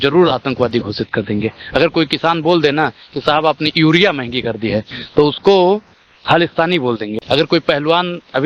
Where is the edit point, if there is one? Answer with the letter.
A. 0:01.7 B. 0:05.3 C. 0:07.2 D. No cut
D